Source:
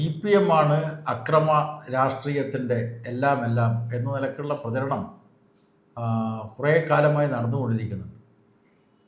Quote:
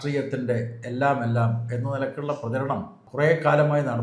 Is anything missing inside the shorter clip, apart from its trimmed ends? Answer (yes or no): yes